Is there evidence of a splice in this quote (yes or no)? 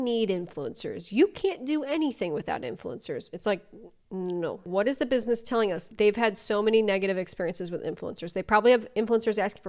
no